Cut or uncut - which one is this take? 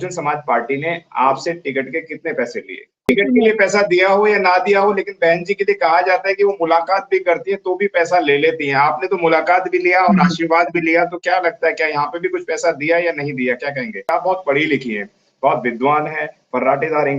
cut